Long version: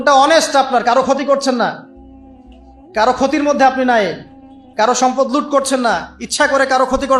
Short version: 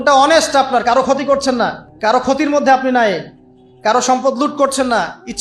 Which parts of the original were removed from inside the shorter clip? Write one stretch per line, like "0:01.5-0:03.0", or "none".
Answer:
0:01.9-0:02.8